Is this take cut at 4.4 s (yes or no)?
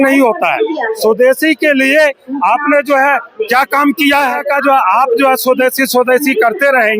yes